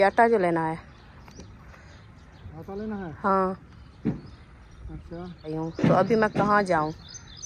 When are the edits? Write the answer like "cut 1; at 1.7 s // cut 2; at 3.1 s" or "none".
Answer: cut 1; at 5.5 s // cut 2; at 6.3 s